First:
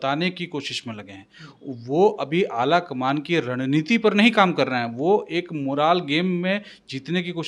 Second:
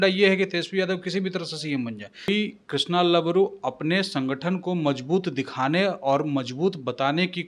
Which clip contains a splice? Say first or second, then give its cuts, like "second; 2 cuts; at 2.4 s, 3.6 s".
second; 1 cut; at 2.3 s